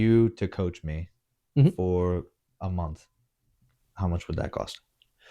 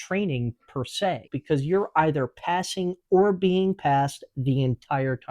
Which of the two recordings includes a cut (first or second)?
second